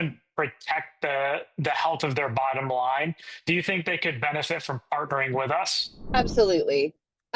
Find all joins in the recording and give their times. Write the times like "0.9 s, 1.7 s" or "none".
none